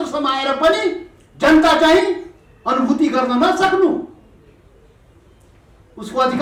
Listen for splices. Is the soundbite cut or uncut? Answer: uncut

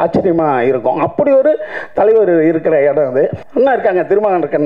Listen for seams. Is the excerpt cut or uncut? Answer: cut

